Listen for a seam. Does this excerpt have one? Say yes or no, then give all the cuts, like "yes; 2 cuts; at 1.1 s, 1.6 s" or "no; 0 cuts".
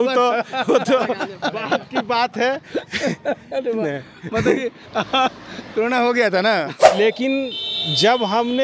yes; 1 cut; at 6.9 s